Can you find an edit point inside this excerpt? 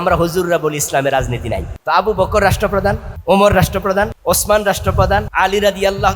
yes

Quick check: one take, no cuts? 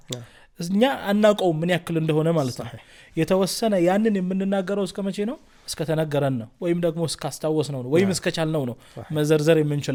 yes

